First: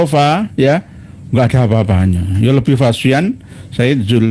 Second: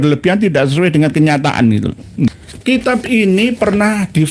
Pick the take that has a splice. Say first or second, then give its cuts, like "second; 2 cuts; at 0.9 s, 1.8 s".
second; 1 cut; at 2.3 s